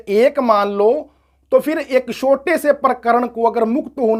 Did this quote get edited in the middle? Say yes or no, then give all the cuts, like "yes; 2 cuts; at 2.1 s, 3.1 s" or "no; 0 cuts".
no; 0 cuts